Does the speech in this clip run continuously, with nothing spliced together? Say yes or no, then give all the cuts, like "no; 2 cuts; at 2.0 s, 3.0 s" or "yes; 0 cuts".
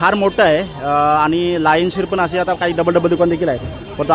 yes; 0 cuts